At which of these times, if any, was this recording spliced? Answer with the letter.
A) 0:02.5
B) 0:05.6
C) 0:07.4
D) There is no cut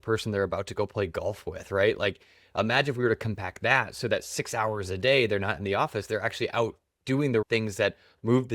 C